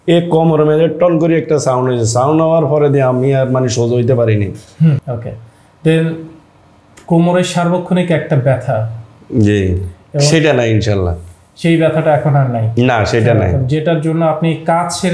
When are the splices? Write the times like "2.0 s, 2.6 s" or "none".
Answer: 5.0 s